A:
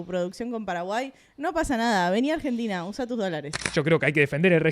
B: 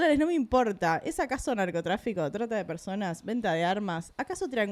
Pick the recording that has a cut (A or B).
A